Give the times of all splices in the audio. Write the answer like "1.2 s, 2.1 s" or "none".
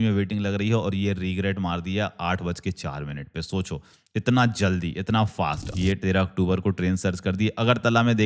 5.6 s